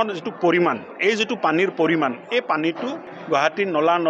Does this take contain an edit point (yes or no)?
yes